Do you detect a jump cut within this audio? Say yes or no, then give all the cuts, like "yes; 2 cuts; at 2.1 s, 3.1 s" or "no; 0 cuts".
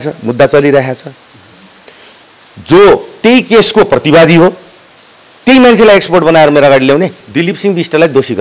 yes; 1 cut; at 7.2 s